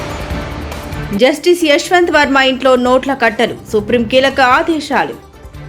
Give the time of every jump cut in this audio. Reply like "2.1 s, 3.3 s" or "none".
0.9 s